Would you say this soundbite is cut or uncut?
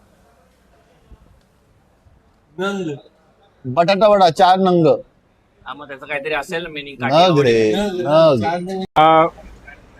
cut